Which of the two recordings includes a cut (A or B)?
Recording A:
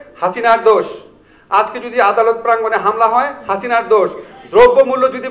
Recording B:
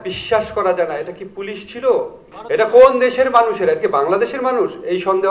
B